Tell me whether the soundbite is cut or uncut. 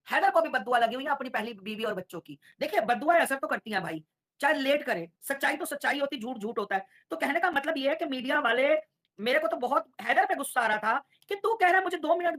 uncut